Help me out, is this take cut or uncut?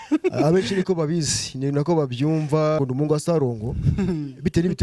cut